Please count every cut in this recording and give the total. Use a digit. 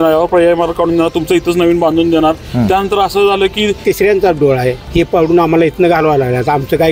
2